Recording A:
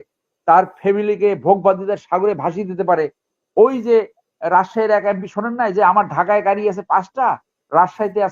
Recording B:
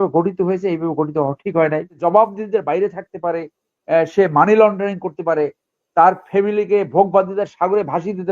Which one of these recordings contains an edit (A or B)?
B